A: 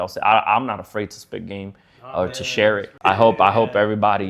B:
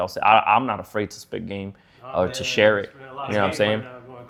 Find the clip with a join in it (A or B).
A